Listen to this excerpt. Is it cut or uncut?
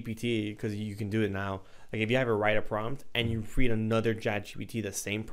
uncut